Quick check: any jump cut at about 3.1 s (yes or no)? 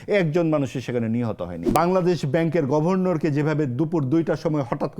no